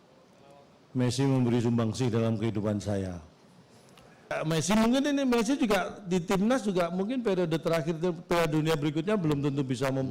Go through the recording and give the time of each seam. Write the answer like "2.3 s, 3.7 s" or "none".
4.4 s